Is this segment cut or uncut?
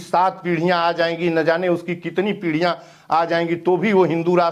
uncut